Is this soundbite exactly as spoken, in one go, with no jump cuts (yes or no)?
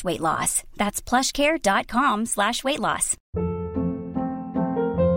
no